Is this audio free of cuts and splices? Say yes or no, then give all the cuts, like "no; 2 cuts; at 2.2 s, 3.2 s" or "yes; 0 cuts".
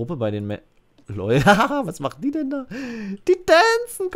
yes; 0 cuts